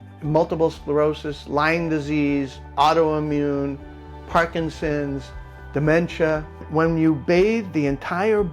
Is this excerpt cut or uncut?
cut